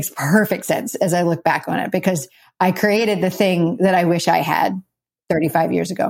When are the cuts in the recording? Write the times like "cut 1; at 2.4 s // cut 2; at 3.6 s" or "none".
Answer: cut 1; at 5.1 s